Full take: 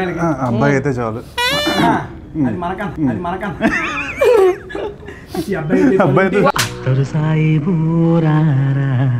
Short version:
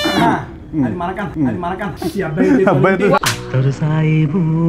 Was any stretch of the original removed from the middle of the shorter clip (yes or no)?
yes